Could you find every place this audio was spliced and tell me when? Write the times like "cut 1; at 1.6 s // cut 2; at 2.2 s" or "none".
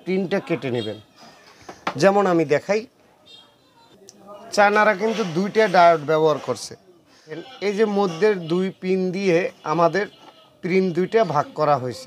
cut 1; at 7.4 s